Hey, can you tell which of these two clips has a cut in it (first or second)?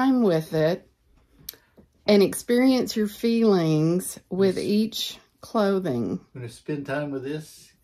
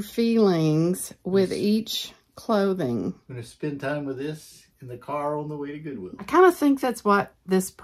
second